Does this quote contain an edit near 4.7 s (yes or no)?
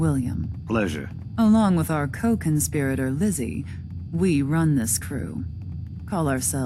no